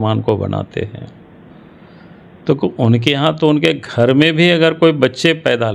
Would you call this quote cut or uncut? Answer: uncut